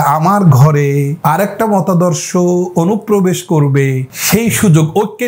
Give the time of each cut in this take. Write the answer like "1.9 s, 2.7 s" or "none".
1.1 s, 4.1 s